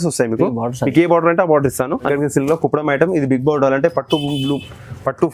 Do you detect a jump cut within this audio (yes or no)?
yes